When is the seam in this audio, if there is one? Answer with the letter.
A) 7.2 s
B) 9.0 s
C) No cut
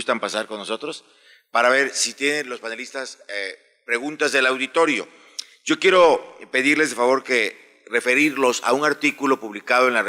B